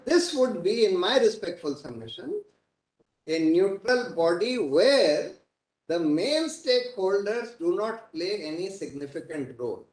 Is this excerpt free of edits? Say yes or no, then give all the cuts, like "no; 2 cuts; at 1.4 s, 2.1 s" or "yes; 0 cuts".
yes; 0 cuts